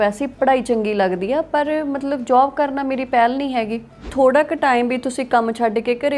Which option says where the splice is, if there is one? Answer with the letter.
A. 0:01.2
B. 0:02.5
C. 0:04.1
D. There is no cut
C